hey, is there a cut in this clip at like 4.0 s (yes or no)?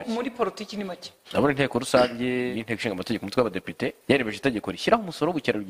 yes